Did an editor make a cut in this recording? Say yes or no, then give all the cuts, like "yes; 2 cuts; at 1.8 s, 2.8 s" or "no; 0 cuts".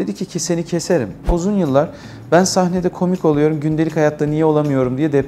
yes; 1 cut; at 1.3 s